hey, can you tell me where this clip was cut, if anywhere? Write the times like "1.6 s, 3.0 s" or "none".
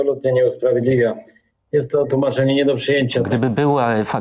3.3 s

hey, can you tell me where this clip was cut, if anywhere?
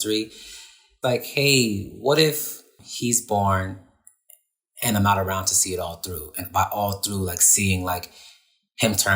0.9 s, 2.8 s

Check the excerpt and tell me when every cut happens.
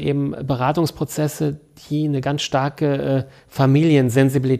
none

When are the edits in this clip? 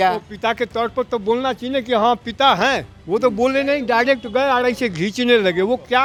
none

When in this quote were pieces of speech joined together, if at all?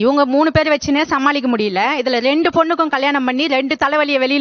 none

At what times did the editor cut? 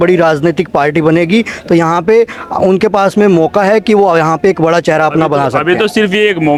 none

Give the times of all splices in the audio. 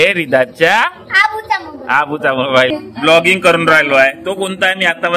2.7 s

